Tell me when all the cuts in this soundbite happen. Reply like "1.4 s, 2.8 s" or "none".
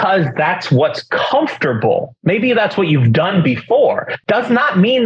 4.1 s

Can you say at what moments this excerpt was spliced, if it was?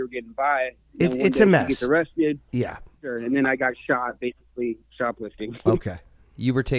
3.1 s

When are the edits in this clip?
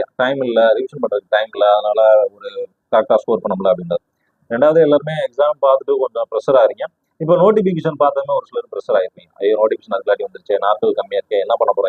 none

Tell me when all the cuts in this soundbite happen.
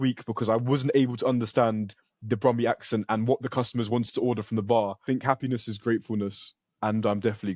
5.0 s

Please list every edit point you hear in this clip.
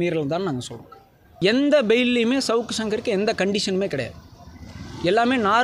1.4 s

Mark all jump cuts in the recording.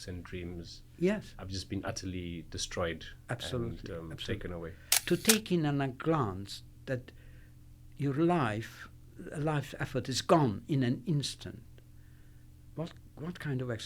4.9 s

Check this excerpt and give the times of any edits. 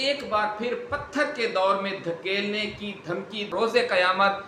3.5 s

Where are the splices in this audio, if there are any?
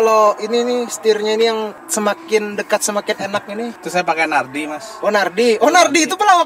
none

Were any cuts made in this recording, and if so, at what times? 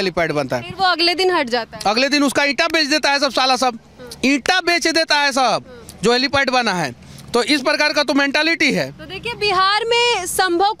none

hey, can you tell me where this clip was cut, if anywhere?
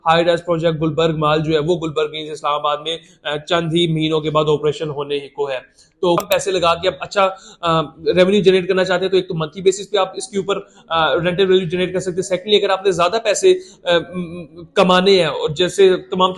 6.2 s

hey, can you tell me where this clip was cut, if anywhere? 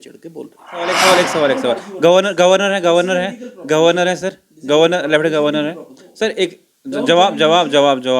1.0 s

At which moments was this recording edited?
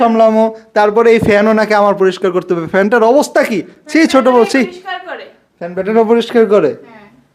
none

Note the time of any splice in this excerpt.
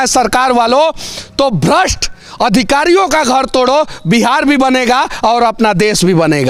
none

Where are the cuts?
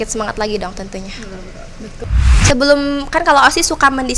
2.1 s

